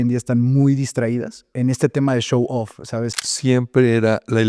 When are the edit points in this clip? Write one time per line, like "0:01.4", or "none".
0:01.5
0:03.1